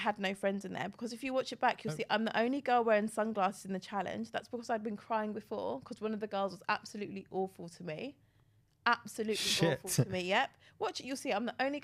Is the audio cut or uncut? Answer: uncut